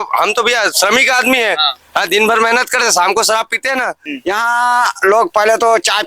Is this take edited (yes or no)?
yes